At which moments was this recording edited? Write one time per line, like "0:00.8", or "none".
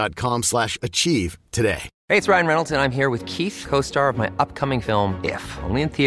0:01.9